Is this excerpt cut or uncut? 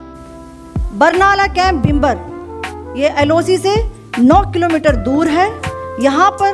cut